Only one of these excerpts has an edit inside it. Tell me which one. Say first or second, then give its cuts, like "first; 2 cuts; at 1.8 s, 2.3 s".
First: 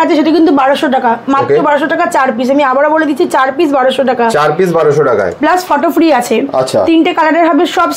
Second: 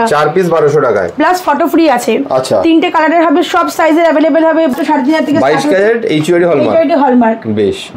second; 1 cut; at 4.7 s